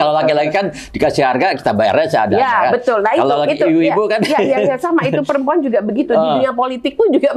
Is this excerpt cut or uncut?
uncut